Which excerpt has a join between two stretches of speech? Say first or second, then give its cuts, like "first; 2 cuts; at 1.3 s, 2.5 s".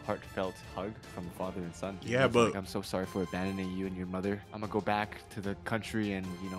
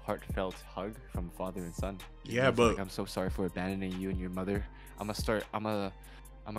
first; 2 cuts; at 2.0 s, 4.5 s